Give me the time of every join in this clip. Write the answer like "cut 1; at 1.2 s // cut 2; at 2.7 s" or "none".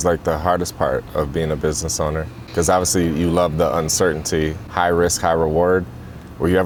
none